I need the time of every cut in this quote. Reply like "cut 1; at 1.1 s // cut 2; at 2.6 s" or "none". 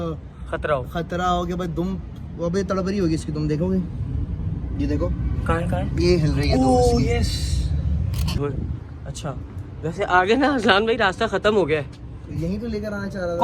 cut 1; at 8.4 s